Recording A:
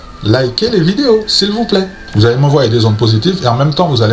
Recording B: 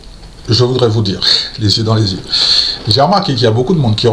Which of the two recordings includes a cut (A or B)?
A